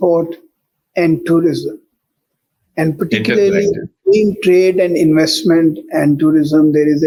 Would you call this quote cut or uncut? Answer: uncut